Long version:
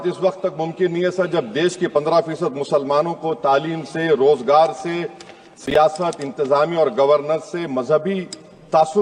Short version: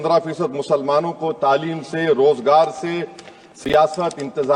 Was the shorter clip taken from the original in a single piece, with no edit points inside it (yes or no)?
yes